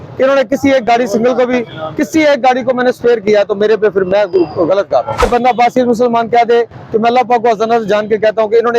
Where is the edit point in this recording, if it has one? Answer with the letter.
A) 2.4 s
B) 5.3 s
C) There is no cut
B